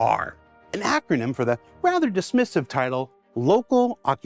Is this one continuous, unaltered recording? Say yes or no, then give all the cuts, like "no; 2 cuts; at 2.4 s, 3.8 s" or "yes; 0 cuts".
yes; 0 cuts